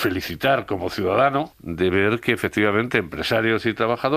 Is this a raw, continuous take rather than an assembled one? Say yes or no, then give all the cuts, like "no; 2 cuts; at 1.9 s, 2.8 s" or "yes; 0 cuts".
no; 1 cut; at 1.6 s